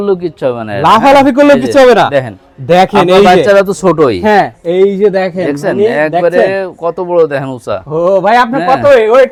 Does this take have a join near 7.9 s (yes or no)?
no